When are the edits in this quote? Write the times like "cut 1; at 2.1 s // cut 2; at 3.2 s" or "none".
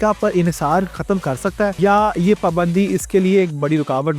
cut 1; at 1.8 s